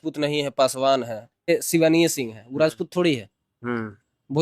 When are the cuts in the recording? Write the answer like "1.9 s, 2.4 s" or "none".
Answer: 1.5 s